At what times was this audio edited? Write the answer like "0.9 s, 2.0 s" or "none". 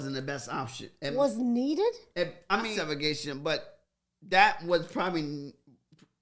none